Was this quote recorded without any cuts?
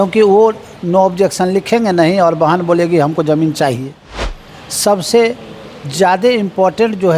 no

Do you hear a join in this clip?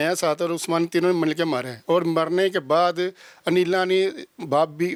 no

